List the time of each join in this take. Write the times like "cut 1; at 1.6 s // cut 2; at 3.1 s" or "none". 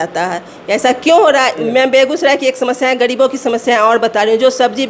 cut 1; at 1.6 s